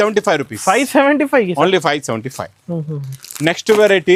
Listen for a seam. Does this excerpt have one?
no; 0 cuts

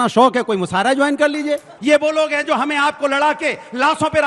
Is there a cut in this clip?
no; 0 cuts

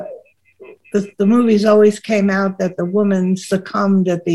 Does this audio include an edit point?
no; 0 cuts

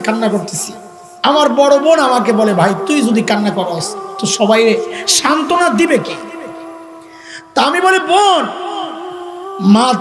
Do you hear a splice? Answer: yes; 2 cuts; at 6.1 s, 7.5 s

